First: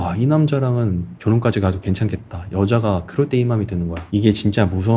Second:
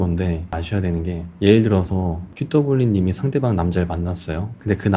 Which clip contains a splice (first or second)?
first